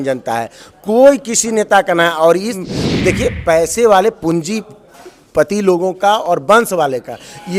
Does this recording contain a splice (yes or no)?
yes